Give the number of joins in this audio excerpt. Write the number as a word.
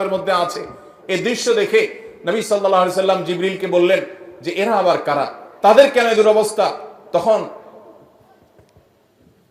zero